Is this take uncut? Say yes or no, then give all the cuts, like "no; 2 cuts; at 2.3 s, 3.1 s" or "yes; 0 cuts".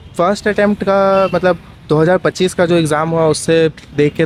yes; 0 cuts